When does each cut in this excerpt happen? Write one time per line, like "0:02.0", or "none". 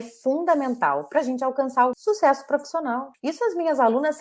0:02.0
0:03.1